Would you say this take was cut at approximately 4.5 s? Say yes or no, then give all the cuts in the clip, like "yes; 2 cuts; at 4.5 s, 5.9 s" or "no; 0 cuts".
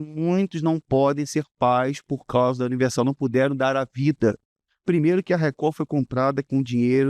yes; 1 cut; at 4.5 s